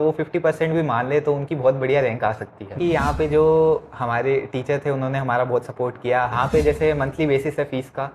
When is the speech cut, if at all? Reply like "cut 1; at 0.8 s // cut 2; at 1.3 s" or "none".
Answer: cut 1; at 2.8 s // cut 2; at 6.3 s